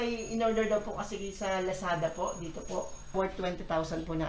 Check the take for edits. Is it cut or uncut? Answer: cut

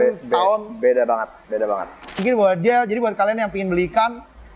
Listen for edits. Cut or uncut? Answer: cut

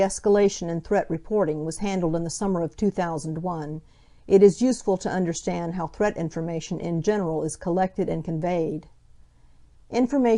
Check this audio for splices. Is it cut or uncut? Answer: uncut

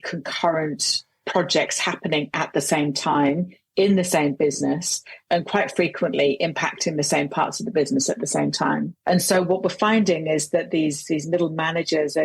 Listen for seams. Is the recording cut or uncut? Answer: uncut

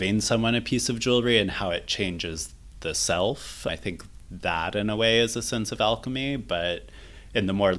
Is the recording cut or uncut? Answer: uncut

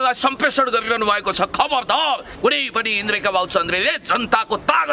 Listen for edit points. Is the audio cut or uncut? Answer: cut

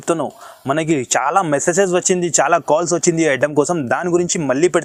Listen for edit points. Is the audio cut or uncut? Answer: uncut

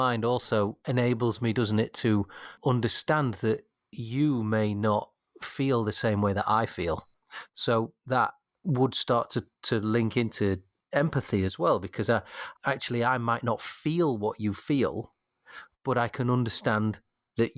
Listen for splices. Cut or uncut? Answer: cut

